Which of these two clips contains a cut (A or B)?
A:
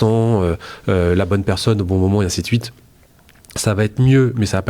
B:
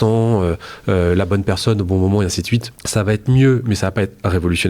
B